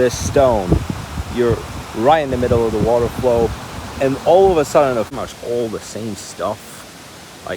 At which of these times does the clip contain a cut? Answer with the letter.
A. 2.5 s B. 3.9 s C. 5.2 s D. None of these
C